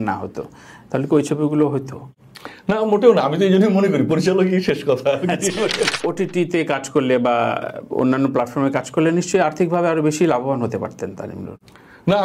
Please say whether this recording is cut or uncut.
cut